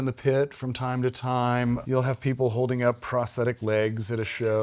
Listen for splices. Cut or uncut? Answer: uncut